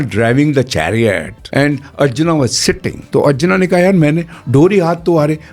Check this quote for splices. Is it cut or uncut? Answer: cut